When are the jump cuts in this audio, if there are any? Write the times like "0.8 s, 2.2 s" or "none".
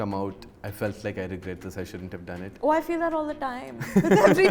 none